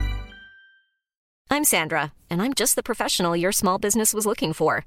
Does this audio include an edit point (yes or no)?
yes